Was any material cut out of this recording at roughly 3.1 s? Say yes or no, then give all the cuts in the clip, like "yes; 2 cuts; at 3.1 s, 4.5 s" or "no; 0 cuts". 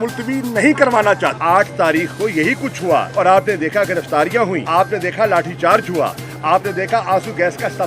yes; 3 cuts; at 1.4 s, 3.1 s, 4.6 s